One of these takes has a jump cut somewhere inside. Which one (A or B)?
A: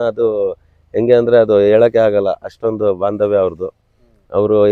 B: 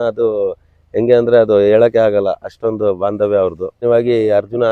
B